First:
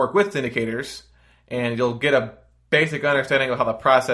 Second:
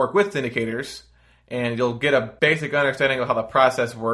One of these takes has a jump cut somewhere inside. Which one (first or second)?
second